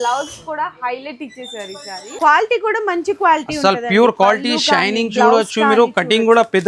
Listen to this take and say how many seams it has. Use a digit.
1